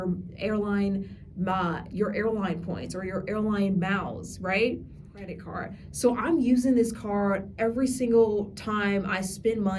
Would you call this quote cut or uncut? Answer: cut